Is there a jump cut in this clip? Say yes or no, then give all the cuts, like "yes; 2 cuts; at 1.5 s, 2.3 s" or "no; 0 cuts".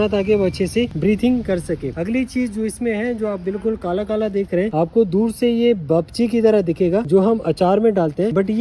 no; 0 cuts